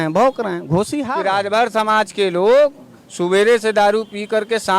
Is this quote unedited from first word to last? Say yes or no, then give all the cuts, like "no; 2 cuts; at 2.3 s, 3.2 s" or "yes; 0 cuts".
no; 1 cut; at 1.1 s